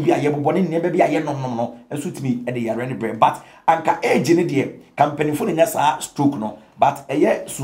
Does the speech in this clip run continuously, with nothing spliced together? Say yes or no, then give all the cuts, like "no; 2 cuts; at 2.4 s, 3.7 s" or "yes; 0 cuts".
yes; 0 cuts